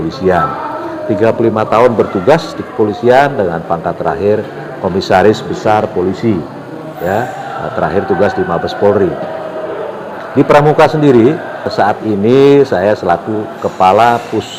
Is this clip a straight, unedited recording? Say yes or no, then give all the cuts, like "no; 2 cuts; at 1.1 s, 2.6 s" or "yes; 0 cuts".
yes; 0 cuts